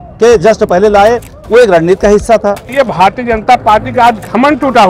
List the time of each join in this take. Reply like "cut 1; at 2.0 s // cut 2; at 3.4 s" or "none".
cut 1; at 2.7 s